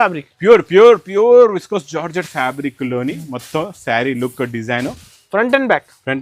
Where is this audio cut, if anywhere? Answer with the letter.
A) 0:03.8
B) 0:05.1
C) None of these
B